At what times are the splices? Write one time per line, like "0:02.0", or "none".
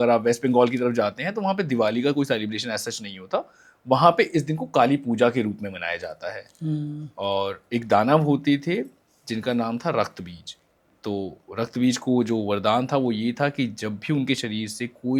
none